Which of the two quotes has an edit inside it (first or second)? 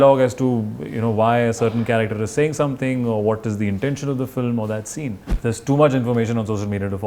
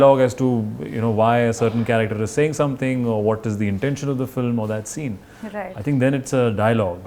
first